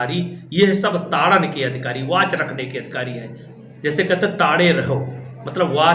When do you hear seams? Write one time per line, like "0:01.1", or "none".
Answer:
0:03.4